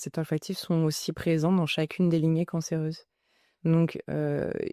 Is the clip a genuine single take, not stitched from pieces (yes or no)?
yes